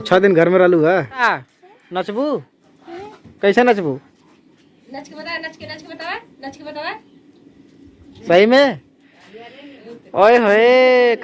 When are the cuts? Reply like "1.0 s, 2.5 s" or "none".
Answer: 1.2 s